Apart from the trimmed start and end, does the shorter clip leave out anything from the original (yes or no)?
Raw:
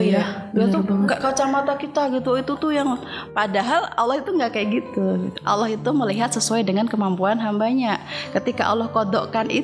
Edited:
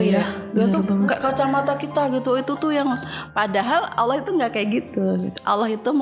no